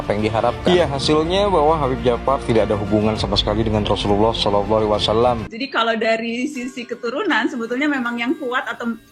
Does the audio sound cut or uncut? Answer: cut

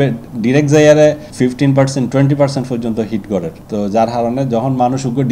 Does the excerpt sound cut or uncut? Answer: cut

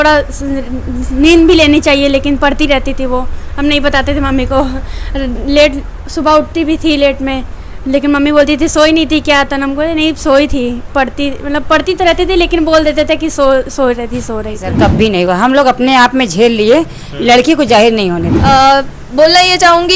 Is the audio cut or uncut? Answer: cut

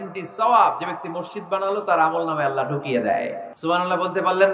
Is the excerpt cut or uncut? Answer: cut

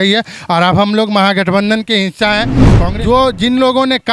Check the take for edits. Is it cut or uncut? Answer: cut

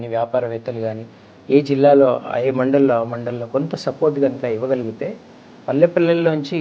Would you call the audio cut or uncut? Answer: uncut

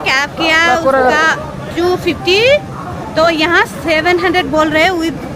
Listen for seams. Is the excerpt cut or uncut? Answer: uncut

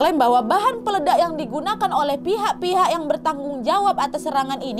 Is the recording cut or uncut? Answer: uncut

